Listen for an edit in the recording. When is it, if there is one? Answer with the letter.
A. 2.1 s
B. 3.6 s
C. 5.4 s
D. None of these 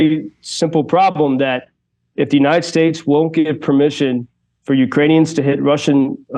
A